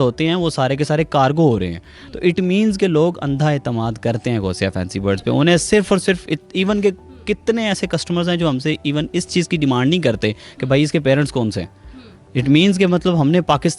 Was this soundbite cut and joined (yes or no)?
no